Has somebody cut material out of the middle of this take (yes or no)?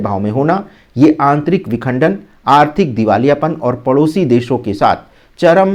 no